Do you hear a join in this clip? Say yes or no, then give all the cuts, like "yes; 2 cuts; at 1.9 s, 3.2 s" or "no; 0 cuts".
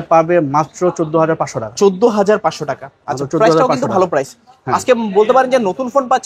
no; 0 cuts